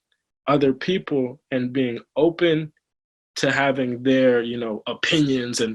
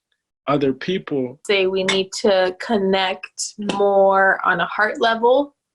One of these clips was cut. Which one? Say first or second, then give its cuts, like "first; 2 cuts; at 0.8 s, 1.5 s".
second; 1 cut; at 1.4 s